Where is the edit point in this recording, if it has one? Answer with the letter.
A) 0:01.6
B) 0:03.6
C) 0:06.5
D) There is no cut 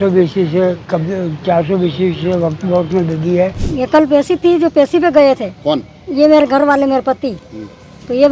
B